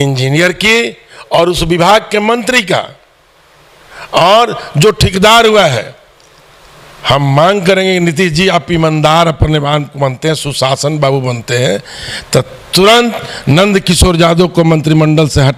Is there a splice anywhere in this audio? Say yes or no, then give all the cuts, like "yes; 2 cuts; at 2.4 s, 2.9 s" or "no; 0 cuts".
no; 0 cuts